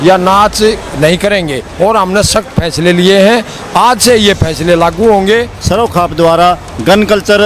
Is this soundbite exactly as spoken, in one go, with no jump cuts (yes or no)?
no